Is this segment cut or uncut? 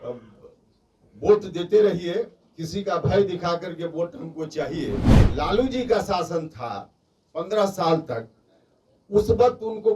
cut